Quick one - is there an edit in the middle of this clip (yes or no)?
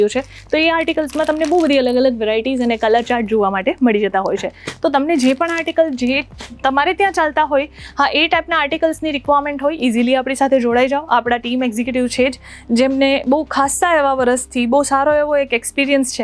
no